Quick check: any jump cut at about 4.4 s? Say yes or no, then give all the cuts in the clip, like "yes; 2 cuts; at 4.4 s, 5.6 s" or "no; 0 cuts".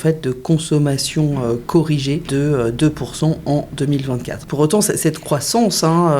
yes; 2 cuts; at 2.2 s, 4.4 s